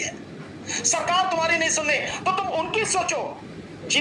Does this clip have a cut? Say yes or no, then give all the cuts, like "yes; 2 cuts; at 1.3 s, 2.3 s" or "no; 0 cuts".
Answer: no; 0 cuts